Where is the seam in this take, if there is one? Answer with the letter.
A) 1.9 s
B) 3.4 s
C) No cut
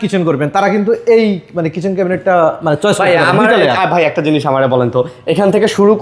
C